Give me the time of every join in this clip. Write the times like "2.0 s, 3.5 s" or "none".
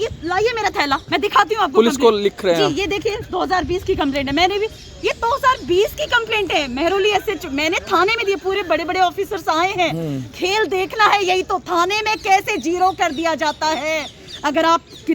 none